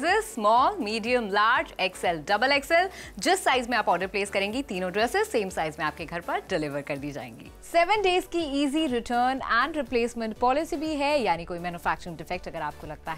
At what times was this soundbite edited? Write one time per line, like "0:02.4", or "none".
0:07.4